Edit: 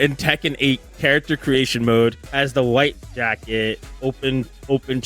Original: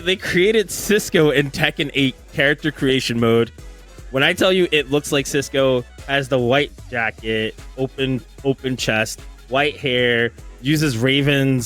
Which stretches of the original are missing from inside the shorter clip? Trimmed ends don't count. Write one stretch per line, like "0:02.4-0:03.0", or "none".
0:03.6-0:06.0